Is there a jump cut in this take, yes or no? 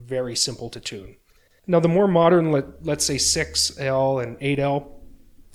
yes